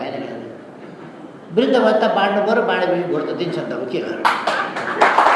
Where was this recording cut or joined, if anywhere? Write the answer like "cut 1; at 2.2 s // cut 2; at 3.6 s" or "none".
none